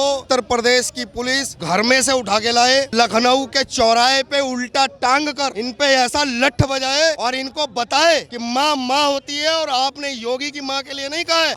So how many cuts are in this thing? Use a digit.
0